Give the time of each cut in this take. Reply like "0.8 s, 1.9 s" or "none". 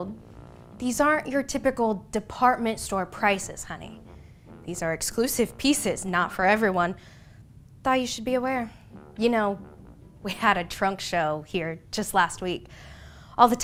none